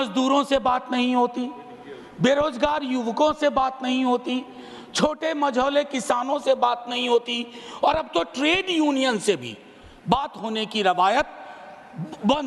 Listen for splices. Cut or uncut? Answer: uncut